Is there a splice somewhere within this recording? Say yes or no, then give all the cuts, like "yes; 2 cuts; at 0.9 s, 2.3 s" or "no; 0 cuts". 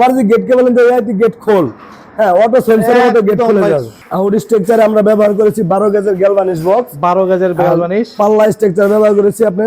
yes; 1 cut; at 4.0 s